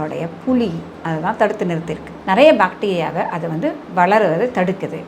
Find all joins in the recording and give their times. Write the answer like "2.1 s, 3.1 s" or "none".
2.1 s